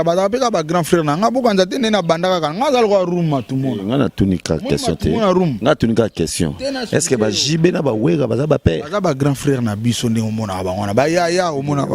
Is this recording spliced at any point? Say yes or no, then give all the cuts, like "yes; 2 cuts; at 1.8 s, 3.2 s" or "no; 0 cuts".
no; 0 cuts